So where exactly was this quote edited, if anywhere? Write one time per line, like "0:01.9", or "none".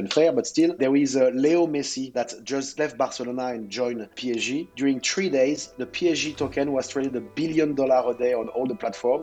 0:00.8
0:02.1